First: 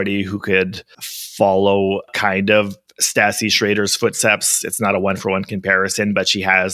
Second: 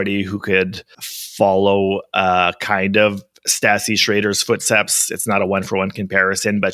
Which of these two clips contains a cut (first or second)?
first